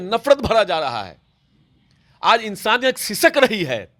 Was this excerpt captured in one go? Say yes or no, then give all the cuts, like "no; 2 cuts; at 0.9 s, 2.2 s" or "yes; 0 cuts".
yes; 0 cuts